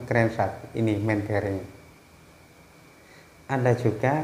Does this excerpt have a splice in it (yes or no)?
yes